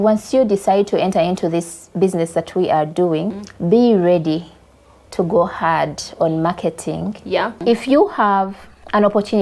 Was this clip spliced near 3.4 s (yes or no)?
yes